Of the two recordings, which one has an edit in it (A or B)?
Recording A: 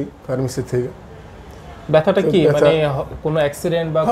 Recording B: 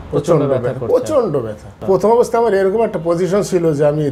B